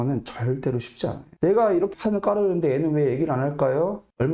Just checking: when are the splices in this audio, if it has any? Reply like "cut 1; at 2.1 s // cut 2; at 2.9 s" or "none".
cut 1; at 1.2 s